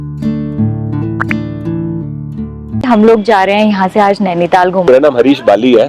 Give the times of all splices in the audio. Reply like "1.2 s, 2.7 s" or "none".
2.9 s, 4.8 s